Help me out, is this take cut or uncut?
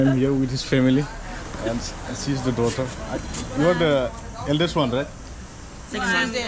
uncut